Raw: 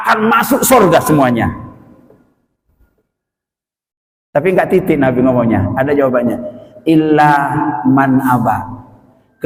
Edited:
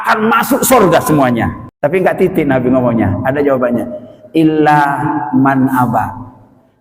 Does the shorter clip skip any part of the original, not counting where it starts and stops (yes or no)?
yes